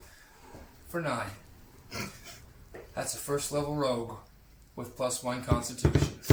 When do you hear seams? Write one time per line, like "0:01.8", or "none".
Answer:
none